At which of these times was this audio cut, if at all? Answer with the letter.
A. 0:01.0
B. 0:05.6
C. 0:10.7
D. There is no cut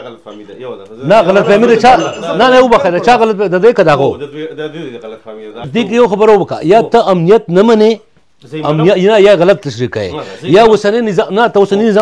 B